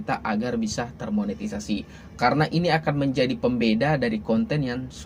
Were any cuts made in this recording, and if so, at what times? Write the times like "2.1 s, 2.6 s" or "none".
none